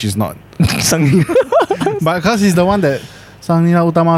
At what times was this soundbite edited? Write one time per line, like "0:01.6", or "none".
none